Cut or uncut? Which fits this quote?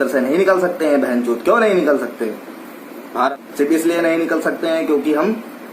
cut